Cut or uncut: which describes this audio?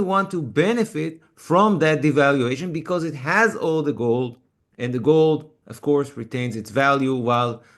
uncut